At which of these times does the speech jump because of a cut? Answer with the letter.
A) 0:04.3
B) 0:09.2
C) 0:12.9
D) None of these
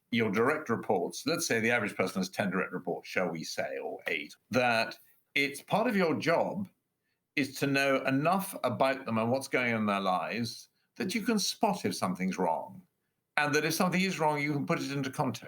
A